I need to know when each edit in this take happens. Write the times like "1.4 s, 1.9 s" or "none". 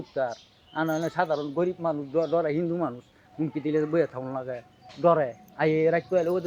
5.4 s